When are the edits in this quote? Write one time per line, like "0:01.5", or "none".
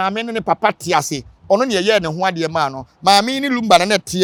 none